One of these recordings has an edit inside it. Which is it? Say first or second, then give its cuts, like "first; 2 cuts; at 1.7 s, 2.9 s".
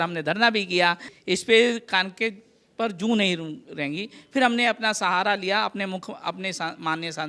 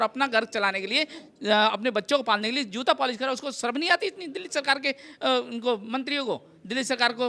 first; 1 cut; at 1.1 s